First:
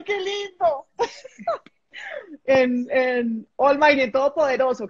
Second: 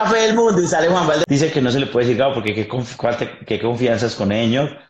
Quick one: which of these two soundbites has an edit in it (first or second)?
second